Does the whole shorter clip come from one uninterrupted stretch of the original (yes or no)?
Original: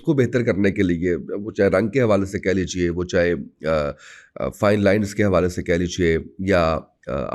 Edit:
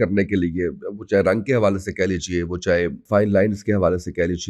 no